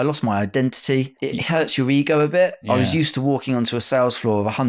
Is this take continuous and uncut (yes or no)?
no